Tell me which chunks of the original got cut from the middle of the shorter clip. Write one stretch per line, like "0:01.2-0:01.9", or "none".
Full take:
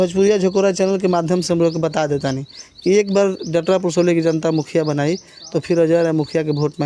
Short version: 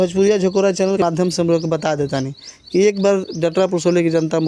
0:01.0-0:01.1